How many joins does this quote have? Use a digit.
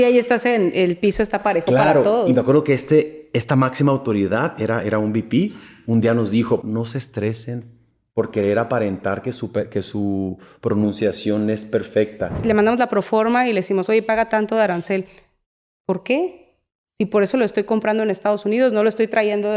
2